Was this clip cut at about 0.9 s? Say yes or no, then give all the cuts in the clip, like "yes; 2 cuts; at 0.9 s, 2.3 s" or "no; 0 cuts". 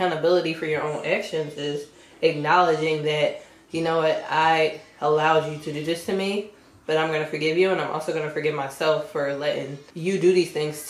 no; 1 cut; at 9.8 s